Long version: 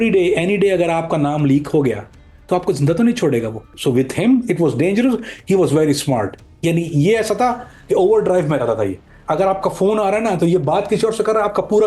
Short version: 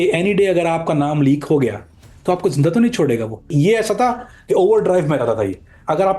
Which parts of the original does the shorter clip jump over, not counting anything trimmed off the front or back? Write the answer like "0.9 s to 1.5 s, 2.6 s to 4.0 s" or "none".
3.7 s to 6.9 s